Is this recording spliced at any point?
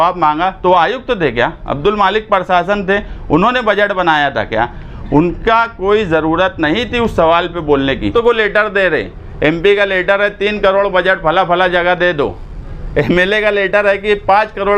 yes; 1 cut; at 8.1 s

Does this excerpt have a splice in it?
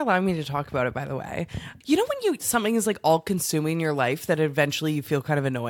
yes; 1 cut; at 1.7 s

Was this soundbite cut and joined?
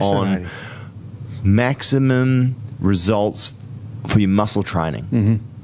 no; 0 cuts

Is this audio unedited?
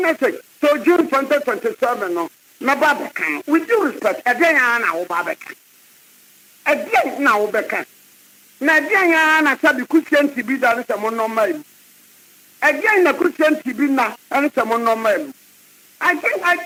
yes; 0 cuts

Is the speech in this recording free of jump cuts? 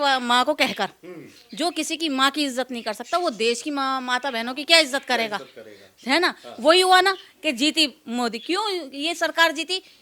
yes; 0 cuts

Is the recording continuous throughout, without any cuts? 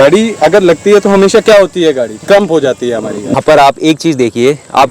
no; 1 cut; at 3.4 s

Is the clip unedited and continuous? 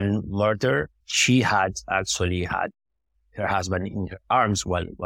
no; 1 cut; at 1.0 s

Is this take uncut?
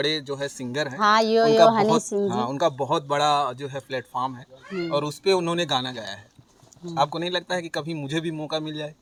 yes; 0 cuts

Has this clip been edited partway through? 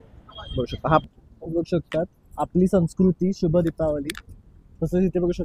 yes; 1 cut; at 1.0 s

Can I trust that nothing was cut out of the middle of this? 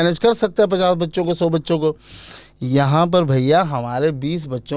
yes; 0 cuts

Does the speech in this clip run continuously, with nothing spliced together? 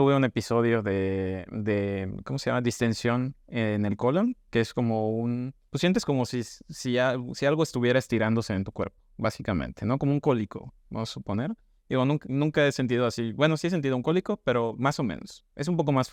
yes; 0 cuts

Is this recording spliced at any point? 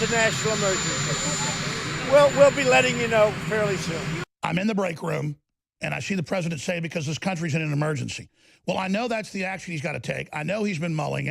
yes; 1 cut; at 4.2 s

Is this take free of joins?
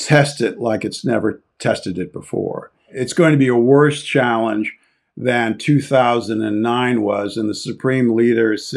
no; 1 cut; at 3.0 s

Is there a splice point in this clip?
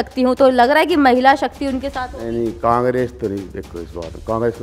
no; 0 cuts

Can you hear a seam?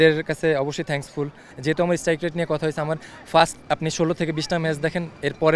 yes; 1 cut; at 1.5 s

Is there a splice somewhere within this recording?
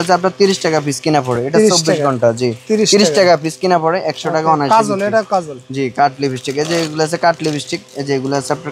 no; 0 cuts

